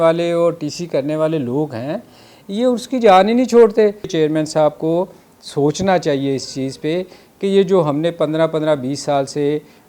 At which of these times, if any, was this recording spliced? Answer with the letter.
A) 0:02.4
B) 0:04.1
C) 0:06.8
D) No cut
B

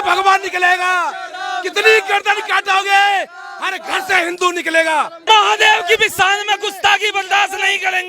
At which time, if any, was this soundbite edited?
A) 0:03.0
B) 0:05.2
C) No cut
B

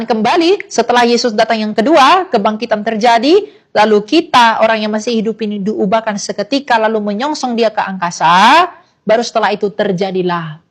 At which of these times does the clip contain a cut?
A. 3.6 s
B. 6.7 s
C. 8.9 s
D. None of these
D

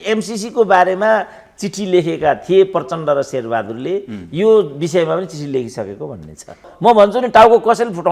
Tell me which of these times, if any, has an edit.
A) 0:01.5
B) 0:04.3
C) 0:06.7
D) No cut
C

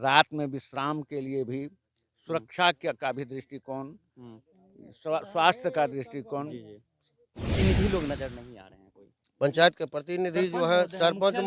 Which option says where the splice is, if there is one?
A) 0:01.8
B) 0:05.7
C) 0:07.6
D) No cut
C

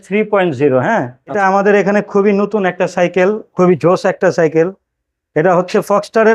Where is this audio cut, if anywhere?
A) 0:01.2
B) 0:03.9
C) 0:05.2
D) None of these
A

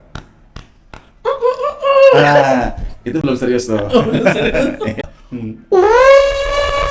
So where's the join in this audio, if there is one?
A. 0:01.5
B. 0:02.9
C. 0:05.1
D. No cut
C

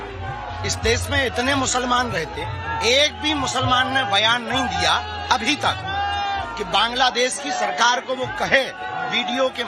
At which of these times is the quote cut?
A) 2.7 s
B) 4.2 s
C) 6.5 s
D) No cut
D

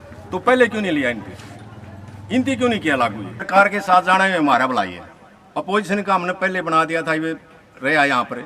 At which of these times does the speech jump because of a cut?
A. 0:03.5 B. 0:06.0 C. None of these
A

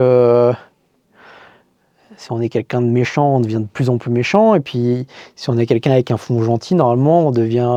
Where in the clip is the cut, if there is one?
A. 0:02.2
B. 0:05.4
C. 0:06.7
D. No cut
D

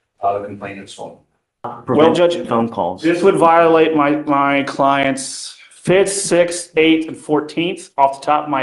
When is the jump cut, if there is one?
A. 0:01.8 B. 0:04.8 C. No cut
A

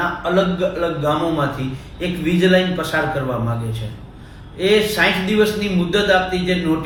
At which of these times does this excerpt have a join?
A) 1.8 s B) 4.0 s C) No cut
C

